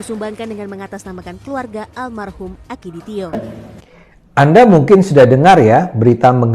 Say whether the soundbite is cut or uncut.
cut